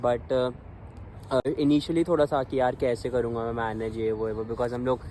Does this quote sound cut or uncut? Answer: uncut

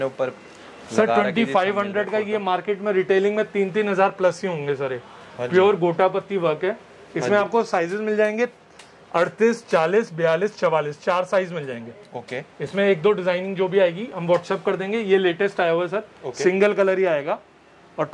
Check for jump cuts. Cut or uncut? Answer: uncut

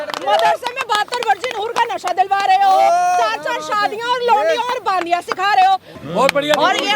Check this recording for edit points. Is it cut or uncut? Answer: cut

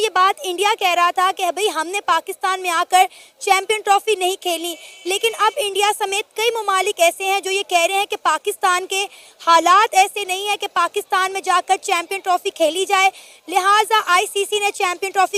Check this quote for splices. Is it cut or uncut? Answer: uncut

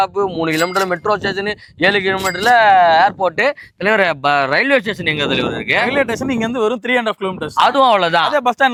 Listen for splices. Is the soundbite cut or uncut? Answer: uncut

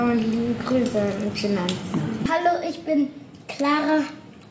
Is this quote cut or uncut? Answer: cut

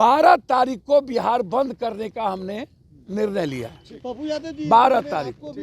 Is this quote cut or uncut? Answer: uncut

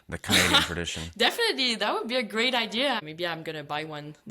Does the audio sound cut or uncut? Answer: cut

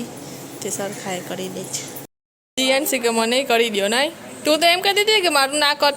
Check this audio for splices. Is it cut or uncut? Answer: cut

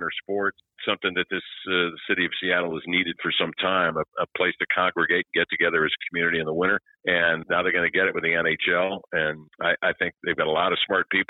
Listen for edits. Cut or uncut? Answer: cut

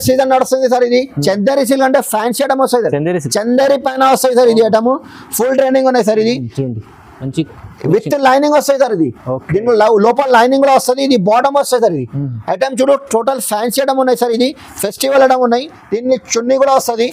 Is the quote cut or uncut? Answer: uncut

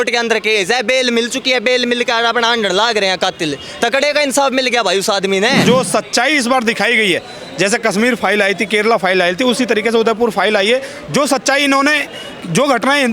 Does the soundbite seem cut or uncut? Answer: cut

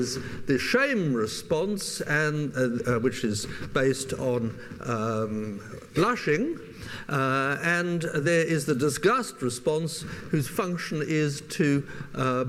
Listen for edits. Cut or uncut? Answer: cut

